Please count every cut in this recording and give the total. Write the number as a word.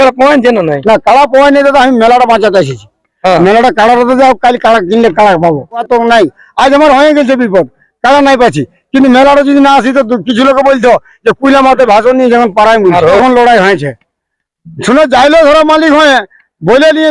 two